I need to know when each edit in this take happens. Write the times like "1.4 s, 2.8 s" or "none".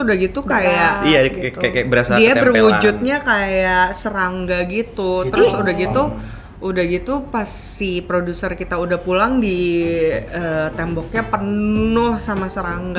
none